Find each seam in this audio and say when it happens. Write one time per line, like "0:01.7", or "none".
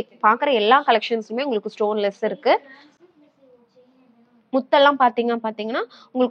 none